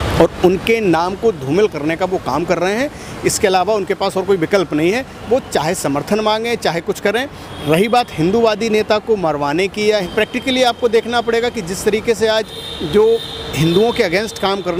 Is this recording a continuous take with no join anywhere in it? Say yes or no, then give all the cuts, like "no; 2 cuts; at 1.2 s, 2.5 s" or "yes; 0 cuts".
yes; 0 cuts